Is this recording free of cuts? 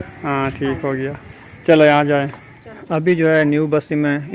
no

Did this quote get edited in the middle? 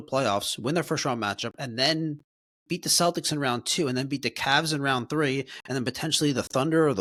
no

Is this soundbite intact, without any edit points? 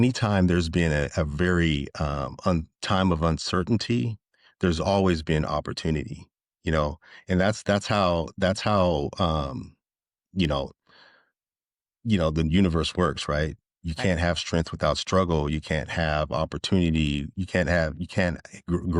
yes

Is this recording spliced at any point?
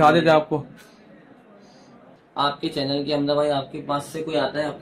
yes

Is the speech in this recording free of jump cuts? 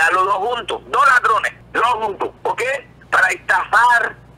no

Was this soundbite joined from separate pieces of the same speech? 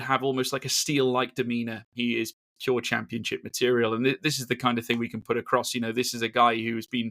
yes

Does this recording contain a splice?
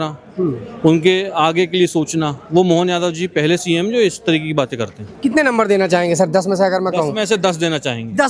no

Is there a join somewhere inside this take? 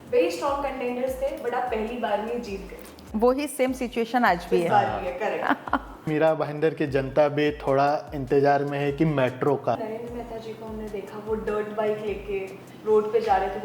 yes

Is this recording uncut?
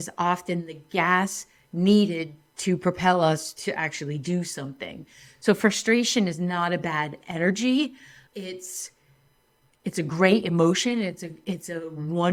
yes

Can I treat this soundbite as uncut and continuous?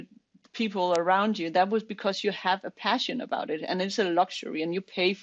yes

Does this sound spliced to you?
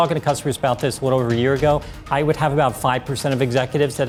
no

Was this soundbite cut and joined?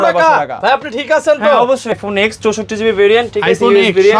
yes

